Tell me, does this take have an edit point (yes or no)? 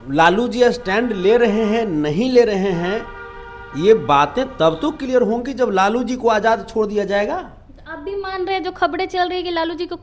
no